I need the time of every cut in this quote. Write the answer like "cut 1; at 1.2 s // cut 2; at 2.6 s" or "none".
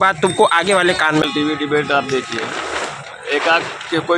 cut 1; at 1.2 s